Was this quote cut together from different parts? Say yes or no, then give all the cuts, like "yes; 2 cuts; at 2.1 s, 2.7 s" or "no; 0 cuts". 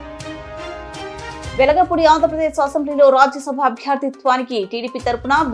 no; 0 cuts